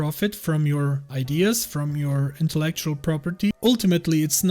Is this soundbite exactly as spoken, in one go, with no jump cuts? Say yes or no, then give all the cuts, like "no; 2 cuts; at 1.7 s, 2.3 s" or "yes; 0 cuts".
no; 2 cuts; at 1.1 s, 3.5 s